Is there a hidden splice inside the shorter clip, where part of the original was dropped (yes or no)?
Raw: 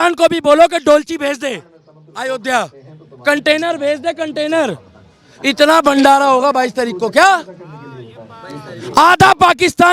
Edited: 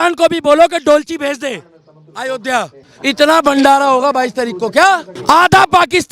yes